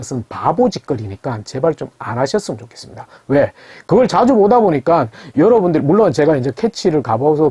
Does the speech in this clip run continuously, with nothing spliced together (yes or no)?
yes